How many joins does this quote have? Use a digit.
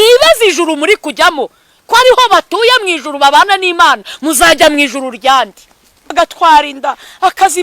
1